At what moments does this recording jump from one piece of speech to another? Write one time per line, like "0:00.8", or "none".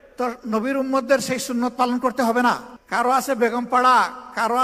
0:02.7